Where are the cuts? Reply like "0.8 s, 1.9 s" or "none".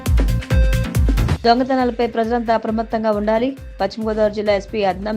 none